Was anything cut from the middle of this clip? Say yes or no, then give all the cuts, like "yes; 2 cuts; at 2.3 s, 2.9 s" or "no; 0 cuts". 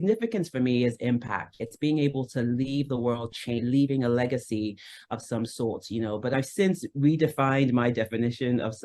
yes; 3 cuts; at 1.6 s, 3.6 s, 6.3 s